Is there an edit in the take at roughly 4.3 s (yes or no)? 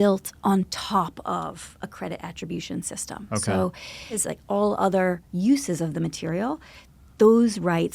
yes